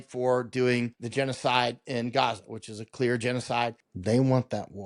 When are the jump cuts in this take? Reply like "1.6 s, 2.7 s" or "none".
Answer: 1.0 s, 3.9 s